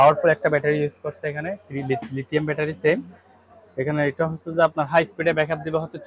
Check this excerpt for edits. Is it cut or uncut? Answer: uncut